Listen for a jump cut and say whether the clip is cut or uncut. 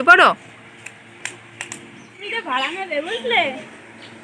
cut